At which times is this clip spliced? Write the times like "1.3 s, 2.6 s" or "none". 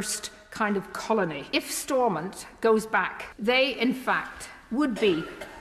1.4 s, 3.2 s